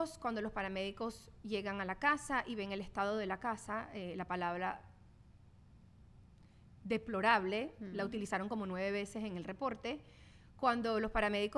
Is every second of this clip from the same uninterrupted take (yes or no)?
yes